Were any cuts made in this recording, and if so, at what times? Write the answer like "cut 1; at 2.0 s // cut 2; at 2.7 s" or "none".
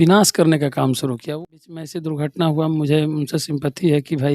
cut 1; at 1.2 s